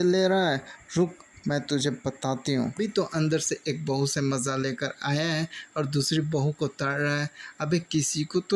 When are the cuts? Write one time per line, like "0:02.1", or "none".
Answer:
0:02.9